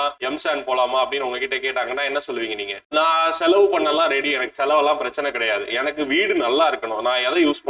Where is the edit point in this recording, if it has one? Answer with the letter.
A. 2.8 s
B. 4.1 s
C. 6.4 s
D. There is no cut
A